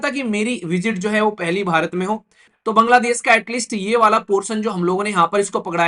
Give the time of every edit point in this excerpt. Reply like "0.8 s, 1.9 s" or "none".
2.5 s

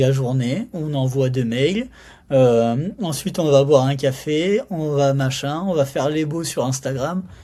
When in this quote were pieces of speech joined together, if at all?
none

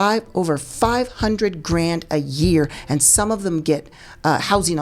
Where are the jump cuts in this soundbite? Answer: none

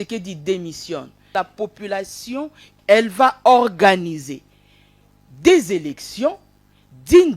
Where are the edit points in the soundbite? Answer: 1.3 s, 2.7 s

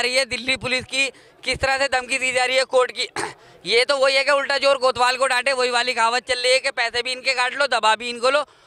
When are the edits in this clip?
none

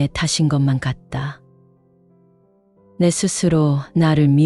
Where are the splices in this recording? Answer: 1.4 s, 3.0 s

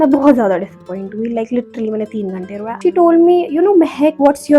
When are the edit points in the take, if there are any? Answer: 2.6 s

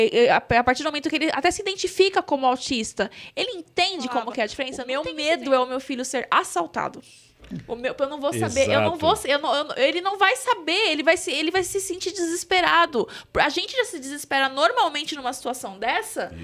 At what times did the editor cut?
4.7 s

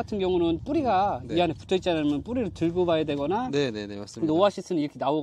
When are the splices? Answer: none

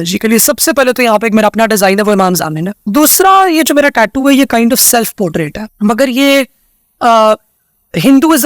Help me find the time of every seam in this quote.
2.8 s, 5.6 s

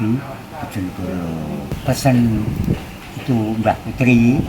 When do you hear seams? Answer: 1.8 s

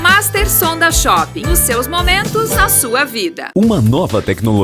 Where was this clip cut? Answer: 3.4 s

